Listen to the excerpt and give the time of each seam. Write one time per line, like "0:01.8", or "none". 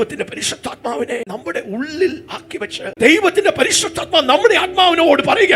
0:01.3
0:02.9